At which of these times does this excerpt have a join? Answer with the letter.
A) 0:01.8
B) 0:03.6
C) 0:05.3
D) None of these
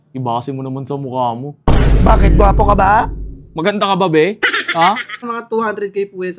C